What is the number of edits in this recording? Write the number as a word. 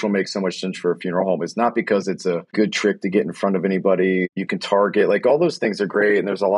two